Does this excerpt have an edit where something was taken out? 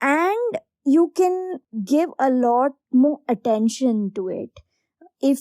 yes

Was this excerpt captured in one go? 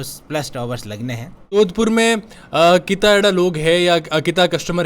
no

